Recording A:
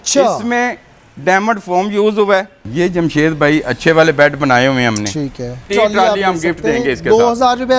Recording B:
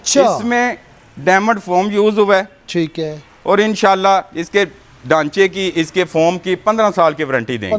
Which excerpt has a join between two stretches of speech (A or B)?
A